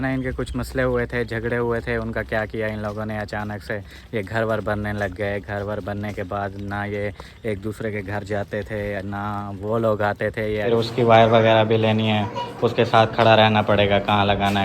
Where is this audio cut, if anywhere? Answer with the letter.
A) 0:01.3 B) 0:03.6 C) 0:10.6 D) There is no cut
C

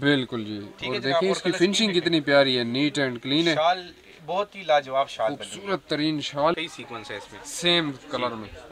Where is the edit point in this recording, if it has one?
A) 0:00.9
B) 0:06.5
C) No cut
B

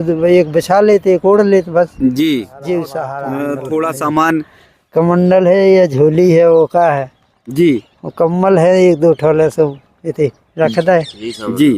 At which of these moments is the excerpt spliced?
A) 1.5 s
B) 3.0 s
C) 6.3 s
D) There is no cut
B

